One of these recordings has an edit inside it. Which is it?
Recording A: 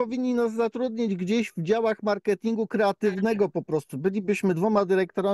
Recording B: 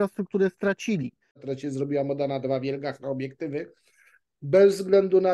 B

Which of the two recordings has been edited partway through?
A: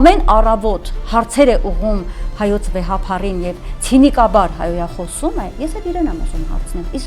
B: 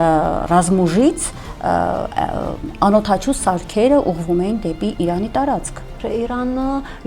B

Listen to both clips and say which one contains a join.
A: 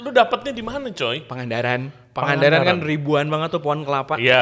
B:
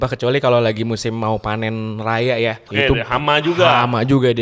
B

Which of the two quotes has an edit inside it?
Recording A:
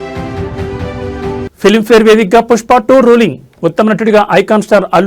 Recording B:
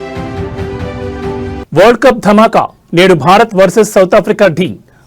A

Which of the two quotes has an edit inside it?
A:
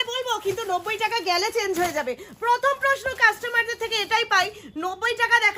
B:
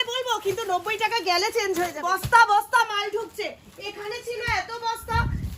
B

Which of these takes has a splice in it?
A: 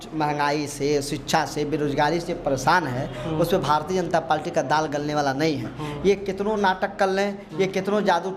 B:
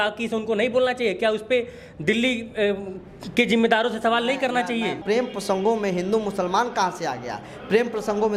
B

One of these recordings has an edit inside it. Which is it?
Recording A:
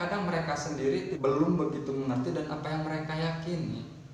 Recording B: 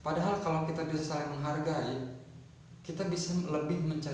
A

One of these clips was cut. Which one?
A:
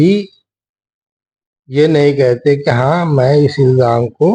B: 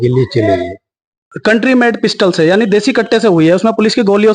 B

